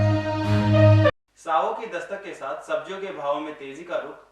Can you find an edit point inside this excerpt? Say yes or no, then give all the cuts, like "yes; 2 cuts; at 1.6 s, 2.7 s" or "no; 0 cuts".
no; 0 cuts